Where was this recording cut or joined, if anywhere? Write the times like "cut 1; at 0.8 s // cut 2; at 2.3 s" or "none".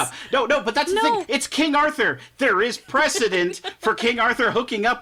none